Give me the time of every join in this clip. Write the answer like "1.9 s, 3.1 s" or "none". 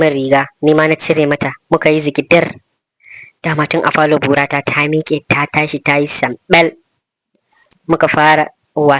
none